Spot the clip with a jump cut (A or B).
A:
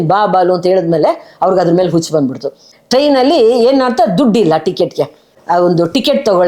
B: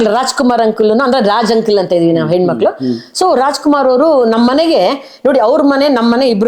A